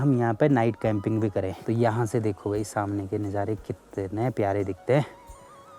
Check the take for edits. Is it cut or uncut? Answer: uncut